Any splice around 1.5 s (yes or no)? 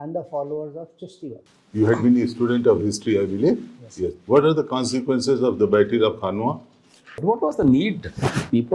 yes